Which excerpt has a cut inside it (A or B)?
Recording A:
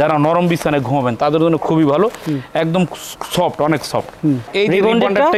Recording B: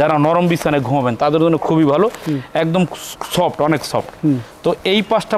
A